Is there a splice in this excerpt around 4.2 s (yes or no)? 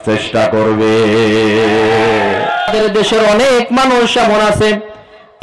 no